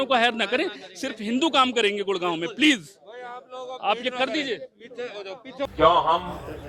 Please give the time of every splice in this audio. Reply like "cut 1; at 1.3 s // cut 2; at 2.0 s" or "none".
none

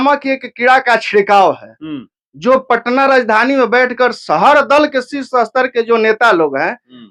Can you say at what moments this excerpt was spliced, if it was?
none

